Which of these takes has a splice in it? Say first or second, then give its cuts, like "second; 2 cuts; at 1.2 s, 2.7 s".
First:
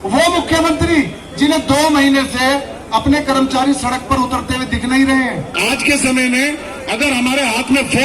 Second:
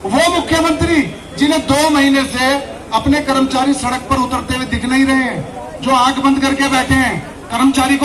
first; 1 cut; at 5.5 s